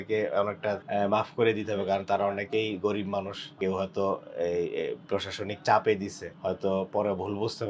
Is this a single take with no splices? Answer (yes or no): no